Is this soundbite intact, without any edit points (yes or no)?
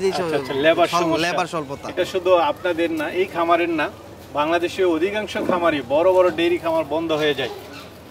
yes